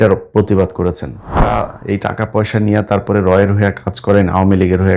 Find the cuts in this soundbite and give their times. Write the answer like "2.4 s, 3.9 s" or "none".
1.4 s